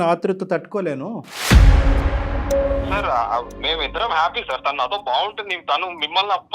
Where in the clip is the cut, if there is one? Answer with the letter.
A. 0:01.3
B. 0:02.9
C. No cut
B